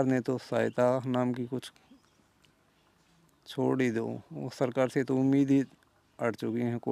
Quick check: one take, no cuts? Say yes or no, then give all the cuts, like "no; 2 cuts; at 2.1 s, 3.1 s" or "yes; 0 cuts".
yes; 0 cuts